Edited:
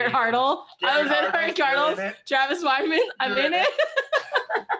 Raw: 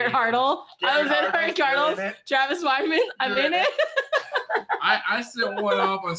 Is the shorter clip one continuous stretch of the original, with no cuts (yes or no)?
yes